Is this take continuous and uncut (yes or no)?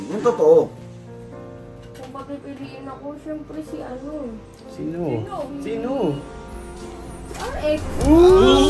yes